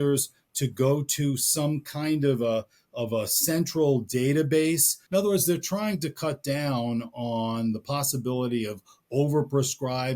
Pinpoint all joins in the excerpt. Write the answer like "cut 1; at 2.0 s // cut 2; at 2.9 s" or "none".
cut 1; at 5.0 s